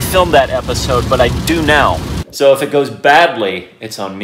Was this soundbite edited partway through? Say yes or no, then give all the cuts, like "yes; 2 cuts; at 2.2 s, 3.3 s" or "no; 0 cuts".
yes; 1 cut; at 2.1 s